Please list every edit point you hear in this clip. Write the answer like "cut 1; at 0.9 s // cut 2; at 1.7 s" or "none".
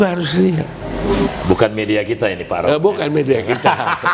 cut 1; at 1.3 s